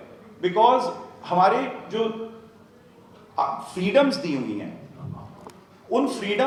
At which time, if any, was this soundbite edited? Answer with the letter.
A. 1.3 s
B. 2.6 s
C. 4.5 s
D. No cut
D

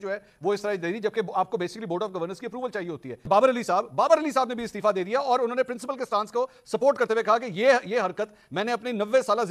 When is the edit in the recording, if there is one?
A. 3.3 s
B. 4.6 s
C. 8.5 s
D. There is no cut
A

